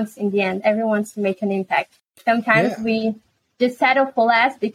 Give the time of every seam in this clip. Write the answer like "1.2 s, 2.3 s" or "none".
none